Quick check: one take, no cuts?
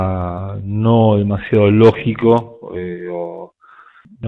yes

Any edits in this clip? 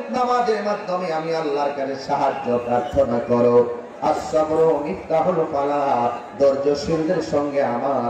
no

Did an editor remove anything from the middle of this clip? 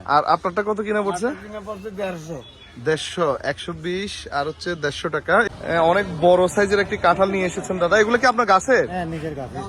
yes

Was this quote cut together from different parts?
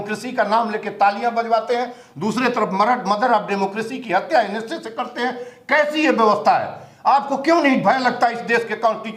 no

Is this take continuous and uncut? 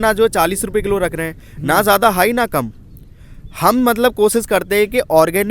yes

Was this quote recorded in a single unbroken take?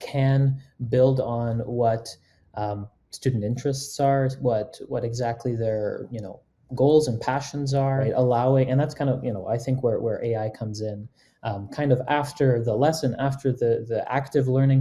no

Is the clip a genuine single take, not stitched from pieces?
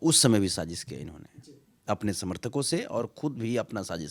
yes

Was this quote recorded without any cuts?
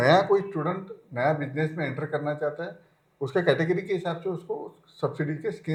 yes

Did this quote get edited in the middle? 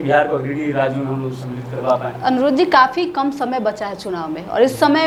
no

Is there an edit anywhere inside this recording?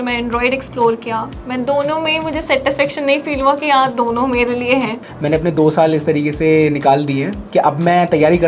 yes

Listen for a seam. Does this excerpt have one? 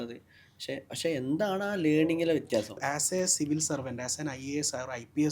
yes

